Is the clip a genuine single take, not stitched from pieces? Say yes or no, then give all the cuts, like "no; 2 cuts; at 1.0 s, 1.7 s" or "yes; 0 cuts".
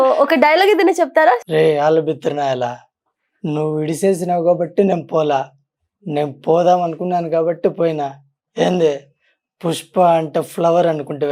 no; 1 cut; at 1.4 s